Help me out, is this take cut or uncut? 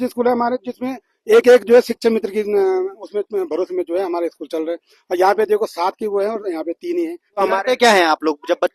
cut